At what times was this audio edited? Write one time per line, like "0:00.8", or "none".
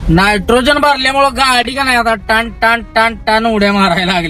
none